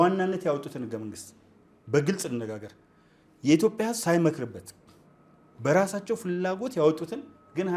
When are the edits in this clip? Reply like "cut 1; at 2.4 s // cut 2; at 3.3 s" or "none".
none

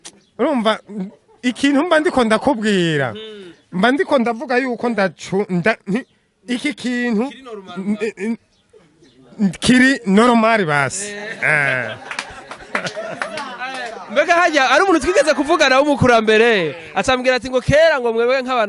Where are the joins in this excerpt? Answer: none

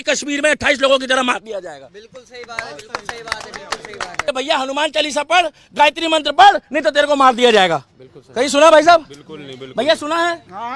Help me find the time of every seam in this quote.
cut 1; at 4.2 s

